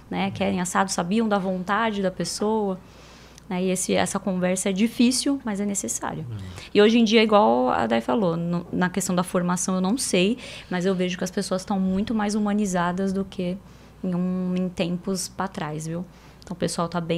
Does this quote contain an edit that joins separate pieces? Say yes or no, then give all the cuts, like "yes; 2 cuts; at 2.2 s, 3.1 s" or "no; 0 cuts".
no; 0 cuts